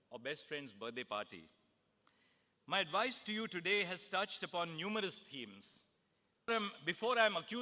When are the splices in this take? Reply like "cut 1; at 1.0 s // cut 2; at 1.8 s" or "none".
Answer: cut 1; at 6.5 s

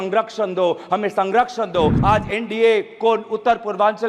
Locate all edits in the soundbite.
cut 1; at 2.0 s

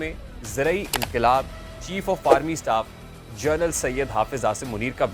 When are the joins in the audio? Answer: none

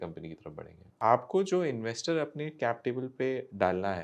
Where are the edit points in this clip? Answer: cut 1; at 1.0 s

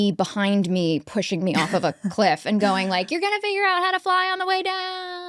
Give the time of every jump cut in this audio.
none

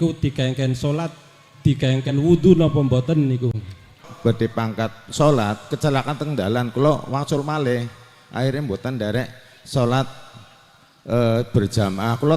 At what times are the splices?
cut 1; at 4.1 s

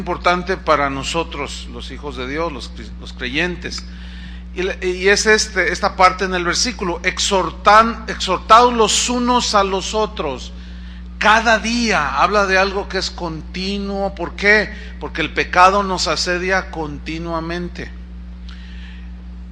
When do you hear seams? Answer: cut 1; at 15.5 s

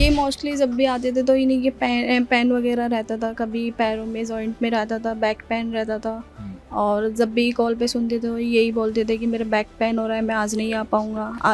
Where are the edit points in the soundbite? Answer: none

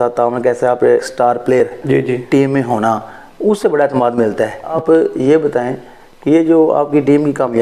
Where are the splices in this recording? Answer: cut 1; at 1.0 s // cut 2; at 4.6 s

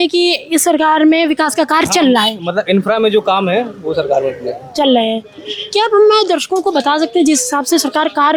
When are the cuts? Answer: none

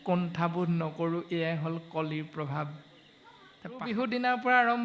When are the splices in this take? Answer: cut 1; at 3.8 s

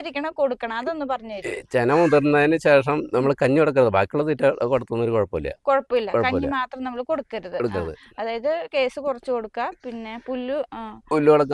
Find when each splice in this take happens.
none

